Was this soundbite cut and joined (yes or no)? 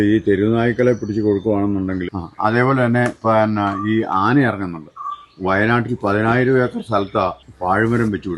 yes